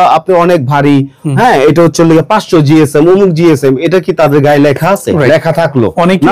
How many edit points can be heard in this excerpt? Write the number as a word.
zero